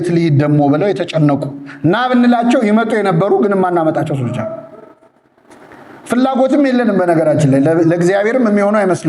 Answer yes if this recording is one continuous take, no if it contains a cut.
yes